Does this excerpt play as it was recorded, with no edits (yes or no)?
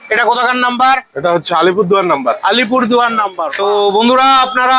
no